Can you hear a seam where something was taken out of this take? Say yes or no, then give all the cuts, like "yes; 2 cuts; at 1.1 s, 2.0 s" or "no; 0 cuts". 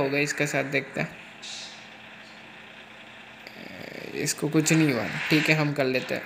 no; 0 cuts